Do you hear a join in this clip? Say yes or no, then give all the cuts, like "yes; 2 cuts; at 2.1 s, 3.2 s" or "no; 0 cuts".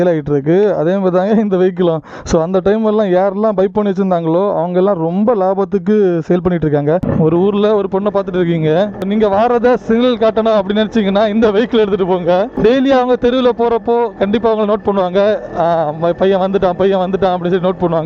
yes; 2 cuts; at 7.1 s, 9.0 s